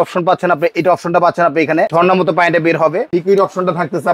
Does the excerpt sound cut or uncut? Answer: cut